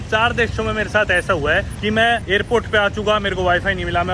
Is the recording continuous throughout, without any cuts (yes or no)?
no